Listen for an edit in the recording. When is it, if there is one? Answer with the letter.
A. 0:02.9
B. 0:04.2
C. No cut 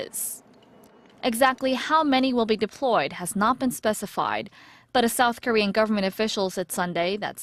C